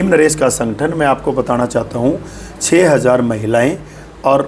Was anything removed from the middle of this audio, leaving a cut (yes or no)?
no